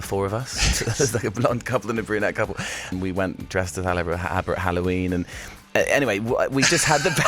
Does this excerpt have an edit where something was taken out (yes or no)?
yes